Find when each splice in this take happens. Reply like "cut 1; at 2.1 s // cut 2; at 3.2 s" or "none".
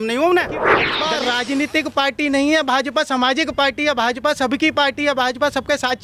cut 1; at 0.9 s